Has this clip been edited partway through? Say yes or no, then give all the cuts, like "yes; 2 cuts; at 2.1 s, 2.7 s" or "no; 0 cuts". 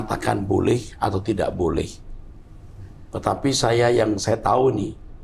no; 0 cuts